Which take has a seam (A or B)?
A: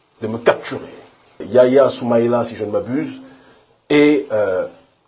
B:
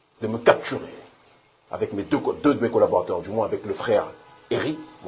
A